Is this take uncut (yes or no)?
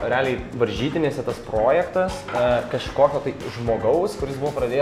yes